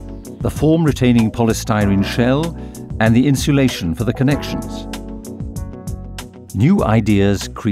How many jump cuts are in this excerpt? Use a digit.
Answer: 2